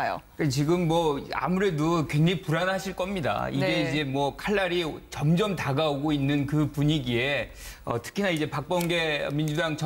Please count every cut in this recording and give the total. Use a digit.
1